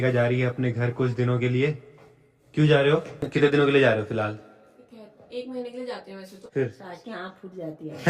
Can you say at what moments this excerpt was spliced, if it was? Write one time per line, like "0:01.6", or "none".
0:03.2
0:06.3